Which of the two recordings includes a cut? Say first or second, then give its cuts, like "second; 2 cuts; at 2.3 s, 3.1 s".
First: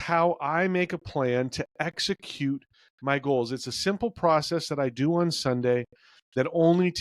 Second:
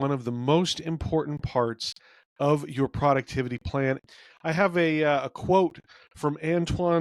second; 1 cut; at 4.1 s